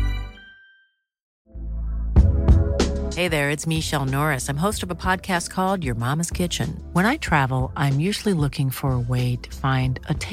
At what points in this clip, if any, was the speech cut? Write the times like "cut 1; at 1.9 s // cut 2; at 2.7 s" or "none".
cut 1; at 1.4 s